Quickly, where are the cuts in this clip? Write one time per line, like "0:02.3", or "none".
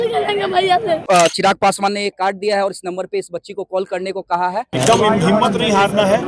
0:01.0
0:04.7